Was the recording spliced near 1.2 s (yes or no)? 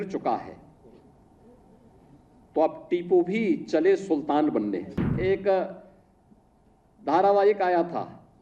no